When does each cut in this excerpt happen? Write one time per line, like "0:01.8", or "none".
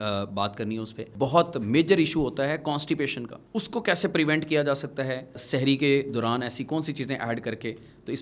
0:01.1
0:05.4